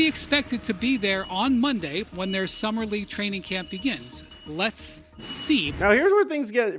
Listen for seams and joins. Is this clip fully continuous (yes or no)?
yes